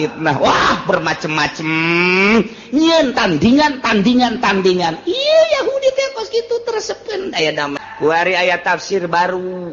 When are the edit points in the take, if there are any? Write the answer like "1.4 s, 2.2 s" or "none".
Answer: 7.8 s